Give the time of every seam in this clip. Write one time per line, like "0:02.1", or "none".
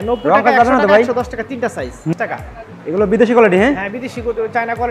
0:02.1